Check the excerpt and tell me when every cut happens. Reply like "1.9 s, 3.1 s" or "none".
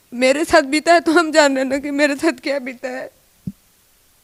none